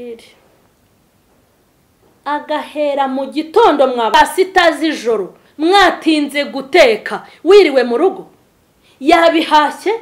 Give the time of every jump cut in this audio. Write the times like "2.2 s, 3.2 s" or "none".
4.1 s